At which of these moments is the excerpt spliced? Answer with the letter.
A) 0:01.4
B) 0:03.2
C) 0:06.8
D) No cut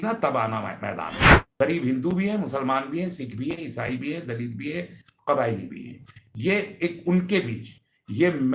A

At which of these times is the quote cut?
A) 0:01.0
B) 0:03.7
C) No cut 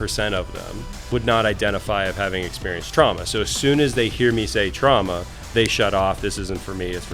A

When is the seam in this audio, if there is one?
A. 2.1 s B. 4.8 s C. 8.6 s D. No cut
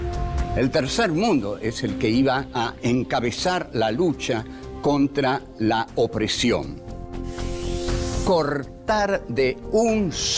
C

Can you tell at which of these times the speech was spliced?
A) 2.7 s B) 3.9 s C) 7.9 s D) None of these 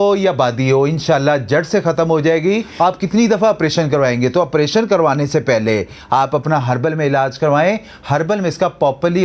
A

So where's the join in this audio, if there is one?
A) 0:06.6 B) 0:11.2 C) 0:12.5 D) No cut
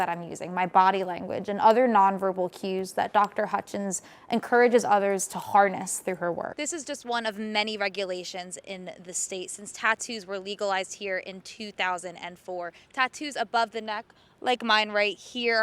A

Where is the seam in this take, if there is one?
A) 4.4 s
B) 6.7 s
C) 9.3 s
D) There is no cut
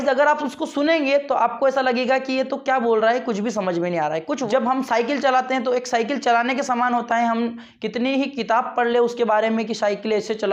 A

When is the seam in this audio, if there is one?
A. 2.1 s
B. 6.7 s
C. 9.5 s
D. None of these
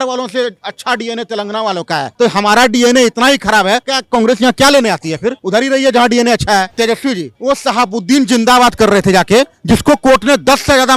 B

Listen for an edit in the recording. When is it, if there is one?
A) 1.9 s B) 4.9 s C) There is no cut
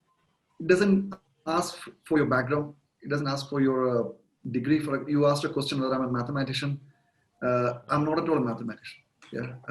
C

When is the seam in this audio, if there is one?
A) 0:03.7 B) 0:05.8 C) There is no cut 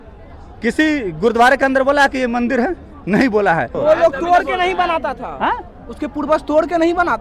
A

